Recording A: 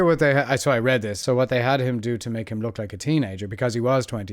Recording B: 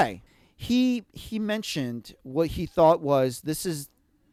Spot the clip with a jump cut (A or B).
A